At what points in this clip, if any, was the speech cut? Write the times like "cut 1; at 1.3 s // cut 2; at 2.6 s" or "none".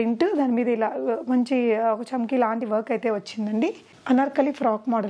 cut 1; at 3.9 s